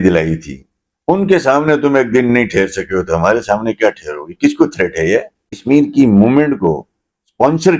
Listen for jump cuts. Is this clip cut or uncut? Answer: cut